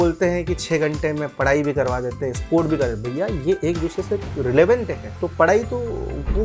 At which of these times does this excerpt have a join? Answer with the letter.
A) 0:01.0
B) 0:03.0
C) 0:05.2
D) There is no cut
C